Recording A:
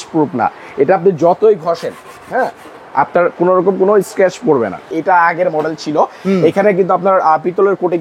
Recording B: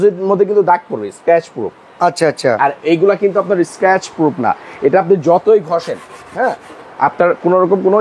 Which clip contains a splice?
A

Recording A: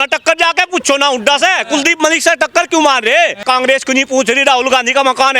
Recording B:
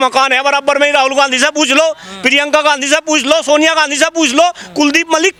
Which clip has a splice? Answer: A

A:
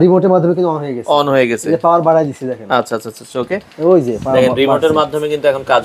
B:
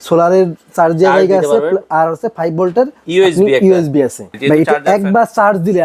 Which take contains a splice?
B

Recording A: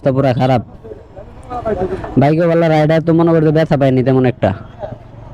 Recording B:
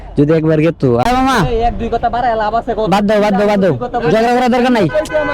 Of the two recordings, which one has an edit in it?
B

